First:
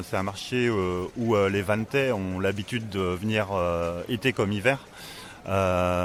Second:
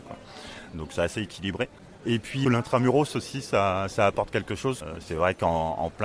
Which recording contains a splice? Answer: second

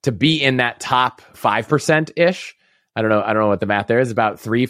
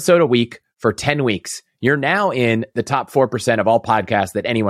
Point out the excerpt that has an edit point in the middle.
first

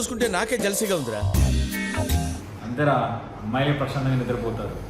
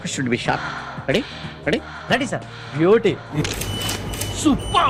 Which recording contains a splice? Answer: first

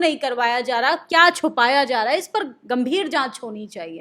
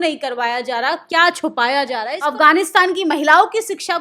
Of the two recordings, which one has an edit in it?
second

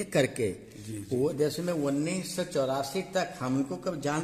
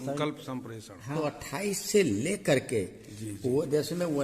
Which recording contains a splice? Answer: second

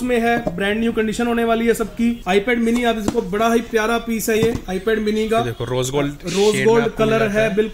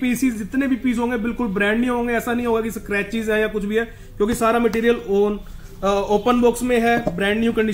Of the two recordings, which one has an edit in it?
first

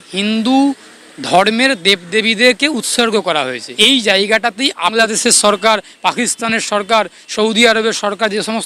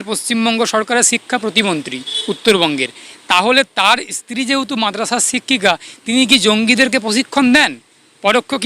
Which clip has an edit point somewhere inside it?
first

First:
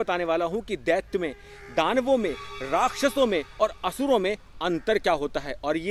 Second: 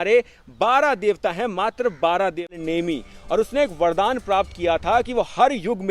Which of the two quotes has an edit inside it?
second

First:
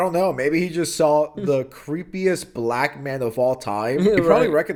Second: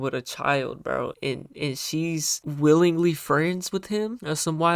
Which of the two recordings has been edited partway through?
second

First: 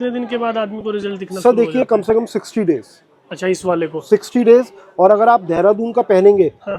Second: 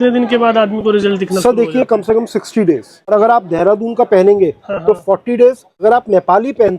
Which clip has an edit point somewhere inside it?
second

